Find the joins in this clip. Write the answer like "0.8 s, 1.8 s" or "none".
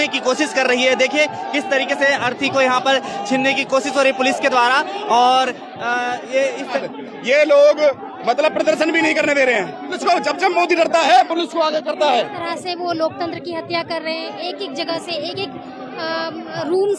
6.8 s, 9.9 s, 12.2 s